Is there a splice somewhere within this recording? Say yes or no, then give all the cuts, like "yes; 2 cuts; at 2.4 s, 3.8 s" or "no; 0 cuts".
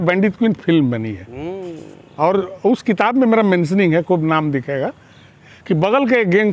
yes; 1 cut; at 5.4 s